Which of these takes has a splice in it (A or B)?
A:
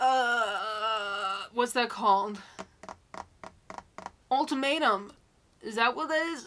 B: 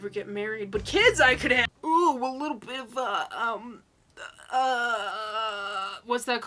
B